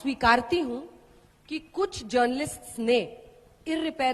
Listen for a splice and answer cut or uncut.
uncut